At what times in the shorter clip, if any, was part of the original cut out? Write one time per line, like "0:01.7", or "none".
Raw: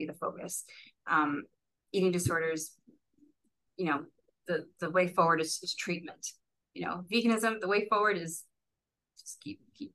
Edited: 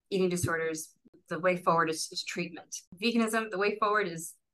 0:01.2
0:02.9